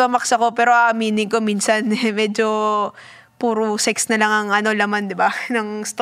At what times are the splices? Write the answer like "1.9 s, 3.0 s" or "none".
none